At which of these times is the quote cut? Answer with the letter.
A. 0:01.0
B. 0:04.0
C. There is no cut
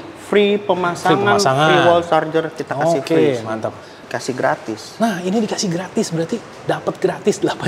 B